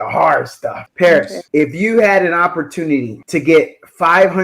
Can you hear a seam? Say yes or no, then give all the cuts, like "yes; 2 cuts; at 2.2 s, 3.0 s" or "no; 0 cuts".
yes; 3 cuts; at 0.8 s, 1.4 s, 3.2 s